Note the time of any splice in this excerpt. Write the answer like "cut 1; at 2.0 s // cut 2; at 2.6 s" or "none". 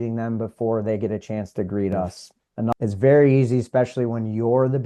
cut 1; at 2.7 s